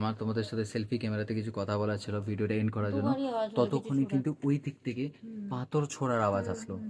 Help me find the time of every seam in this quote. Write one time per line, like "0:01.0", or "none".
none